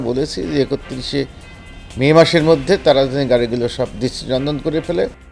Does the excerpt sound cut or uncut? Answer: uncut